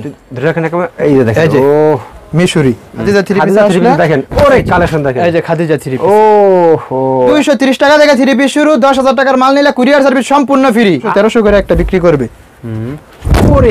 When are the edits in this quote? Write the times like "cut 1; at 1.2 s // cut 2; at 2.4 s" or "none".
cut 1; at 3.0 s // cut 2; at 7.3 s // cut 3; at 11.1 s